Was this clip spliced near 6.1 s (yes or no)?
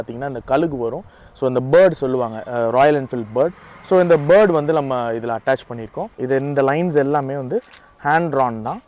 yes